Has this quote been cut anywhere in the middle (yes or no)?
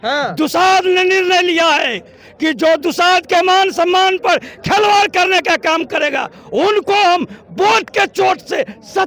no